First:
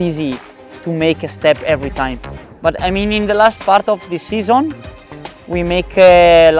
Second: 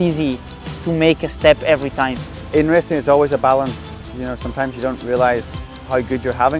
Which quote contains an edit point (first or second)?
second